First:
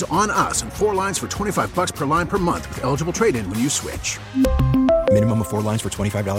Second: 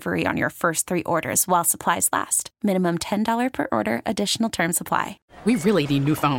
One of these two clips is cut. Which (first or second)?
second